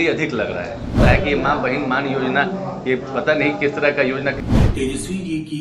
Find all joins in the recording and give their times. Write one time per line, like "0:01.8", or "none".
0:01.0
0:04.4